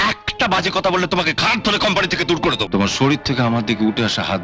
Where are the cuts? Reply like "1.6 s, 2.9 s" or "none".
2.6 s